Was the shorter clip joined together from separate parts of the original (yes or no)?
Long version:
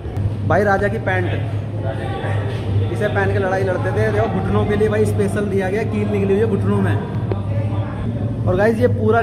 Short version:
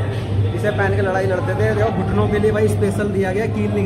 no